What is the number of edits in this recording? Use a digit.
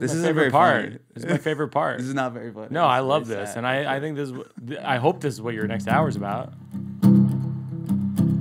1